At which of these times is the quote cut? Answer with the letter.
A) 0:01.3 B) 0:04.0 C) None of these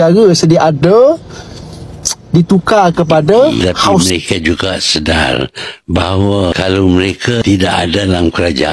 B